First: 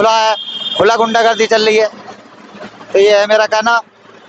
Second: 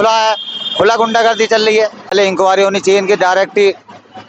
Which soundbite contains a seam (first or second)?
second